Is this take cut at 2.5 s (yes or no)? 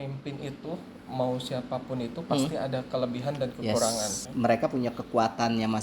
no